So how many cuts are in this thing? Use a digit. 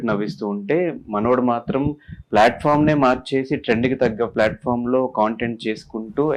0